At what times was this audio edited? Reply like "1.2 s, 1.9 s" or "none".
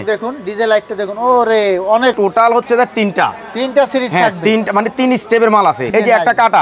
2.2 s, 5.9 s